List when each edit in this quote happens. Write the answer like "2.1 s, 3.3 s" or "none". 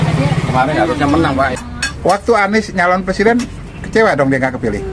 1.6 s